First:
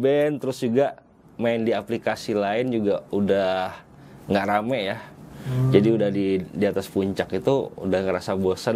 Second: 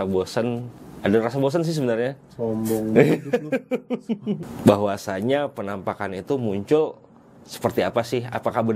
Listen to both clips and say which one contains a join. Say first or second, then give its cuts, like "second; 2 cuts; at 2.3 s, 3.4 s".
second; 1 cut; at 4.4 s